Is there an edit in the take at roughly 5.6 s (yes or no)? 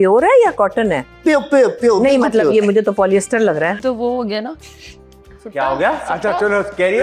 no